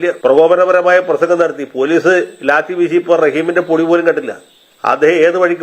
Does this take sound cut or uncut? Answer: cut